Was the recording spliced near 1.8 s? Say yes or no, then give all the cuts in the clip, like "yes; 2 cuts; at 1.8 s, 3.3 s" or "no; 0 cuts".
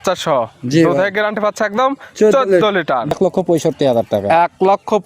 no; 1 cut; at 3.1 s